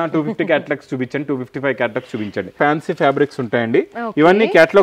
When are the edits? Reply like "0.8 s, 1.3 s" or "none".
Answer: 2.6 s